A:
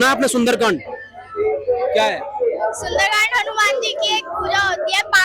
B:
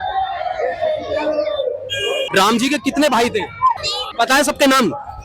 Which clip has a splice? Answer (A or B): B